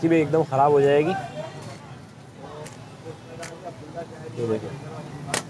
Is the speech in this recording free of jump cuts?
no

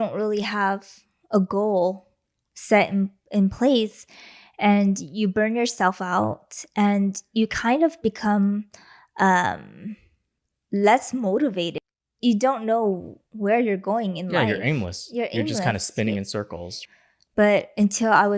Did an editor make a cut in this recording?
yes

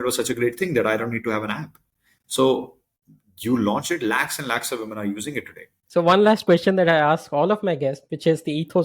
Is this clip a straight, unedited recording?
no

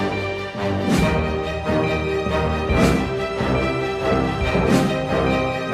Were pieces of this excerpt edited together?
no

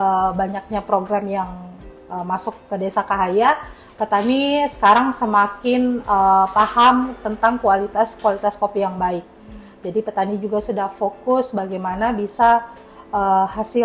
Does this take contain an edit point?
no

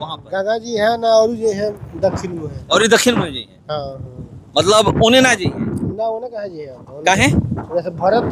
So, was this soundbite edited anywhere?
no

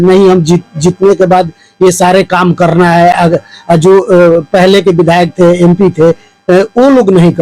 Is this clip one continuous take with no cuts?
yes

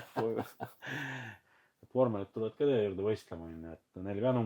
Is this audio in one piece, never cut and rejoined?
no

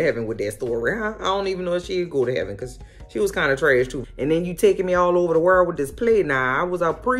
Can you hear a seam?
yes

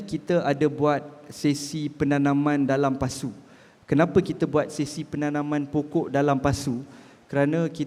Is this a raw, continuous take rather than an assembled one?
yes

